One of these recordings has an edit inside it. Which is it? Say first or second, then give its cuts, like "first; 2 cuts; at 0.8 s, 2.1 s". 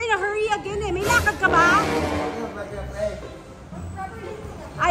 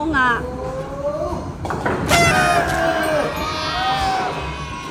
first; 1 cut; at 2.4 s